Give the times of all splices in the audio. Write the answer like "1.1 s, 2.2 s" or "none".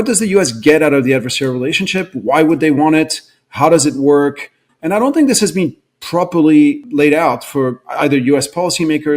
6.8 s